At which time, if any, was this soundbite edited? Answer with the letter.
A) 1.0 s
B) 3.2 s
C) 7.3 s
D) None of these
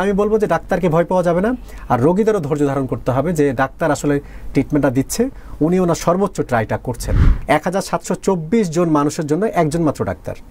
C